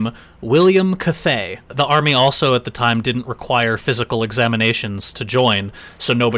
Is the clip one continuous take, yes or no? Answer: no